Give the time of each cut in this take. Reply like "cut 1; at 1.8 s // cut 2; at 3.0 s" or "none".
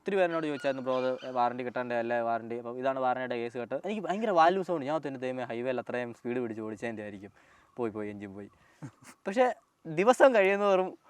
cut 1; at 3.9 s